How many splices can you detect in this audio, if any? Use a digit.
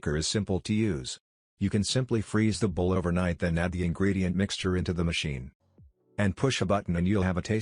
1